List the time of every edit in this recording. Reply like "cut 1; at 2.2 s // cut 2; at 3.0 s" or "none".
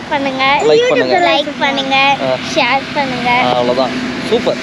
none